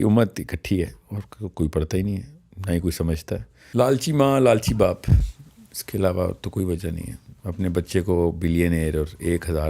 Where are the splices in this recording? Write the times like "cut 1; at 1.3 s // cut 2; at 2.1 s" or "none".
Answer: cut 1; at 3.6 s